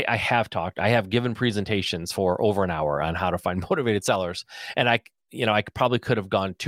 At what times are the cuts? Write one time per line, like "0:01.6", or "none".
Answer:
none